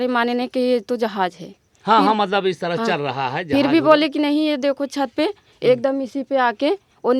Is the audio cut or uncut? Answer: uncut